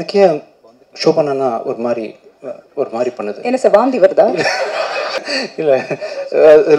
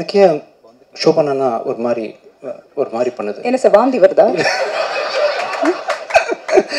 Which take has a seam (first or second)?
first